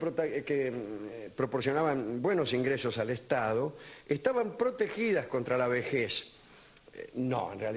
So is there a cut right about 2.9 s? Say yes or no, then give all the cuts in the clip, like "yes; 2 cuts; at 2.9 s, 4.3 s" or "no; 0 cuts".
no; 1 cut; at 1.6 s